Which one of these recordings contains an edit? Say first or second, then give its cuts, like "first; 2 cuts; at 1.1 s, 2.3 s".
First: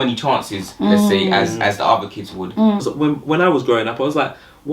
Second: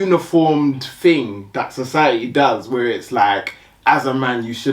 first; 1 cut; at 2.8 s